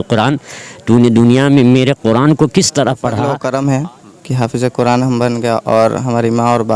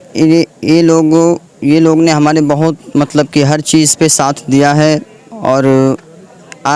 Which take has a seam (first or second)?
first